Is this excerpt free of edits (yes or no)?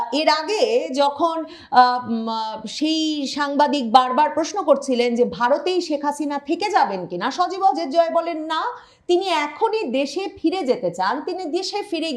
yes